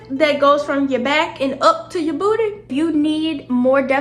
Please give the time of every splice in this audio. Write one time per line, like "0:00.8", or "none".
0:02.7